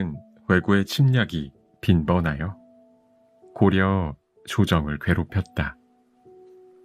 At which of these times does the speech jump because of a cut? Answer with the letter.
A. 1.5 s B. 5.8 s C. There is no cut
B